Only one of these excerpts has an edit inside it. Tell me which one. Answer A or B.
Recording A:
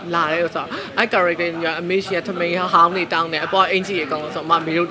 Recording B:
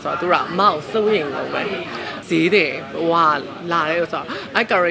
B